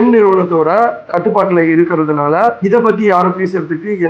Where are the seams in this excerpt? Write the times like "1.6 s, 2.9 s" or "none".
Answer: none